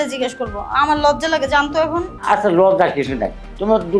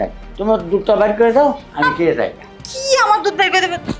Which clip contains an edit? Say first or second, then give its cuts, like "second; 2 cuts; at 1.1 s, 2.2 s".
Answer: first; 1 cut; at 2.1 s